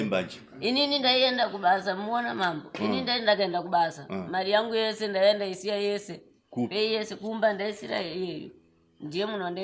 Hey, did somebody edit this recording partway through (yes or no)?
no